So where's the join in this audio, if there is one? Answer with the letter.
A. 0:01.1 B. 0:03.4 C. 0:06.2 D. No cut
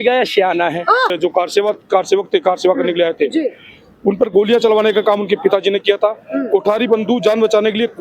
A